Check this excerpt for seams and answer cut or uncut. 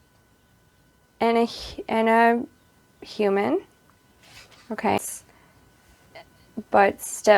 cut